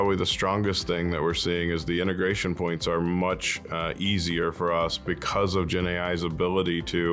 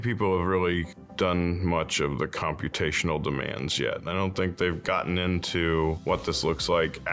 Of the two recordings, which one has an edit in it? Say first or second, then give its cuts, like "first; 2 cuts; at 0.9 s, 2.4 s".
second; 2 cuts; at 1.0 s, 6.0 s